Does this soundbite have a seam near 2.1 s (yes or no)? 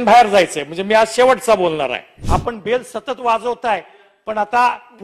yes